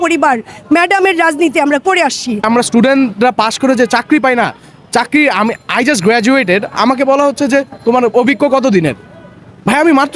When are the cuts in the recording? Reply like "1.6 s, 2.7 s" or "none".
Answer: 2.4 s

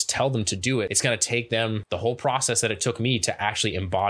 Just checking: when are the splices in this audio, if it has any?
0.9 s, 1.8 s

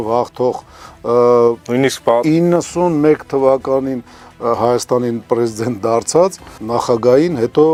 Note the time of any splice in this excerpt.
none

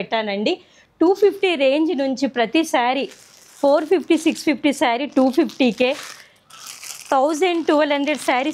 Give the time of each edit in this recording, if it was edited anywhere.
none

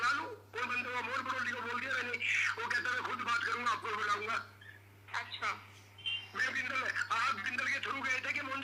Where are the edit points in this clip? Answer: none

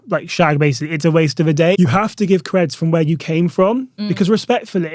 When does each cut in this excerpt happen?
1.8 s

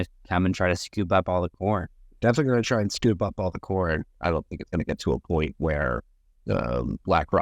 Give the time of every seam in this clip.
2.0 s, 4.2 s

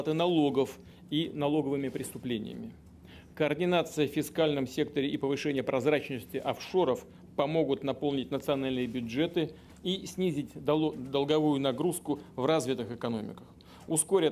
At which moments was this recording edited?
none

